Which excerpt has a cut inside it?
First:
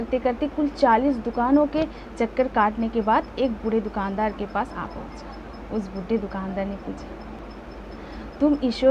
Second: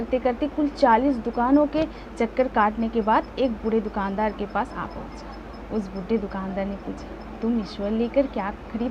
first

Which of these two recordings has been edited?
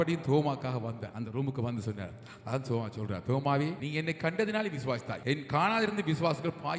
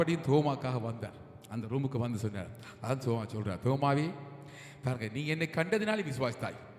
first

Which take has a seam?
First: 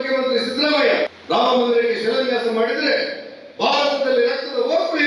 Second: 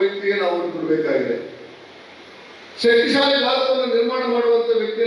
first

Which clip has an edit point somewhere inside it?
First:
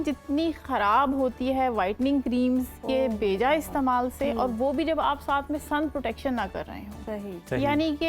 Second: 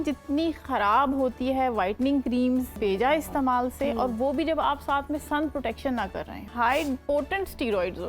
second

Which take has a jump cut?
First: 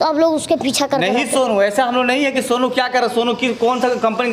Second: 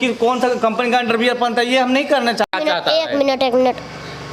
second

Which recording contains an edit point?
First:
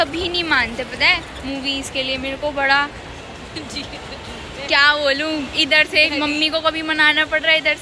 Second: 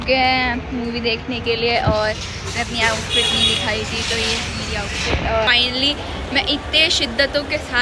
second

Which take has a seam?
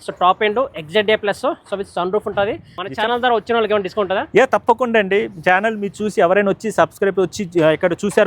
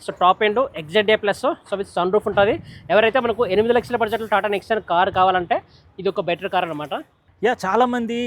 first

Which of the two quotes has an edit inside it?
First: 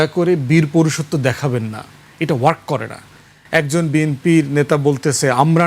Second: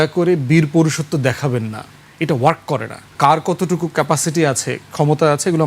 second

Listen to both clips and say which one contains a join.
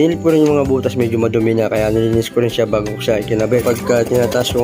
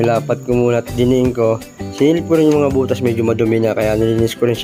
first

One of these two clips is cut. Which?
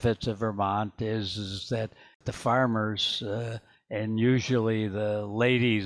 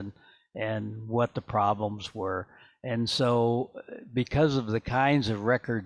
first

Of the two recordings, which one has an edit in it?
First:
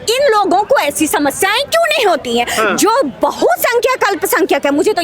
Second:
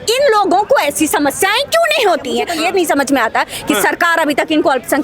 second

